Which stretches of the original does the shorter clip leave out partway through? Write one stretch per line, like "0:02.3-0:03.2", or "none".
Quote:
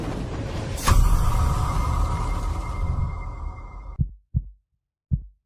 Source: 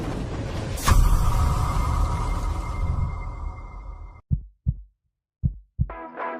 0:03.8-0:04.1